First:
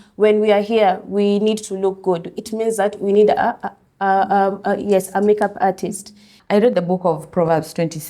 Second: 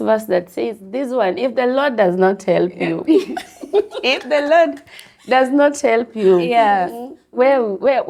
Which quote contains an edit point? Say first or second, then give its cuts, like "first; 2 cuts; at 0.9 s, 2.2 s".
first; 1 cut; at 6.3 s